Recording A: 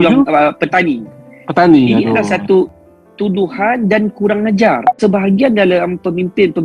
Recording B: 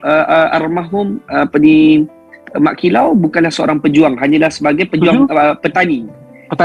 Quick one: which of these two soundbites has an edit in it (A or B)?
A